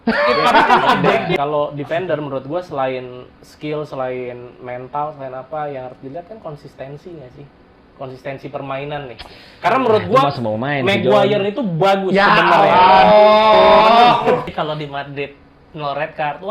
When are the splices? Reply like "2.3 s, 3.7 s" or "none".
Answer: 1.4 s, 14.5 s